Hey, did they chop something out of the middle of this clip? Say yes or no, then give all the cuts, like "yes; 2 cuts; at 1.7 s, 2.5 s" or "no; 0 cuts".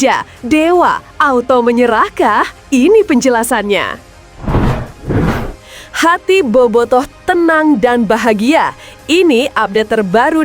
yes; 1 cut; at 4.1 s